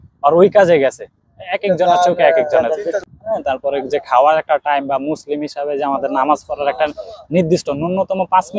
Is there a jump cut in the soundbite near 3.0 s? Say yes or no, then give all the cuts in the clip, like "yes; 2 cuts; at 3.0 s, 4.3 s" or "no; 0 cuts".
yes; 1 cut; at 3.0 s